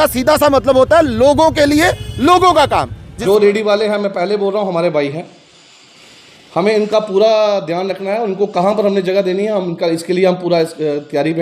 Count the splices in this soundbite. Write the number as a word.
one